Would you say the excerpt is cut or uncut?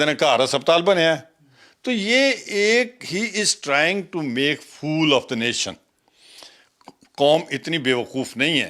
uncut